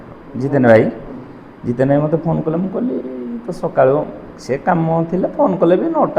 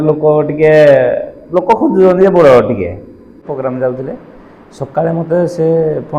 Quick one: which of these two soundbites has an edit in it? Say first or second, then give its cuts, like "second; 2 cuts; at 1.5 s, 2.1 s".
second; 1 cut; at 3.4 s